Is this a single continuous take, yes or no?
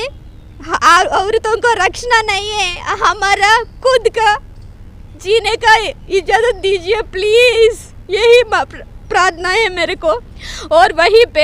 yes